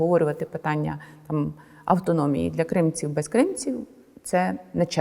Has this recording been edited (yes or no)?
no